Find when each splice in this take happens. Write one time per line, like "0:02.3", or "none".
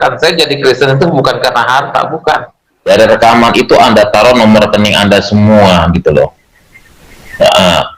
0:02.9